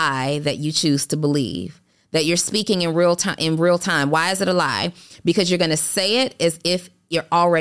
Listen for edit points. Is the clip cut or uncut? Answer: uncut